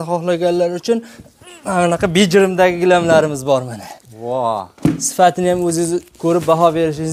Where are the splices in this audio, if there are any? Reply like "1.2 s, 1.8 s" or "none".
none